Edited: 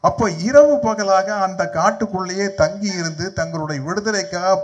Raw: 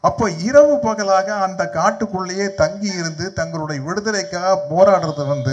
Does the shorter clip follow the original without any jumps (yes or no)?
yes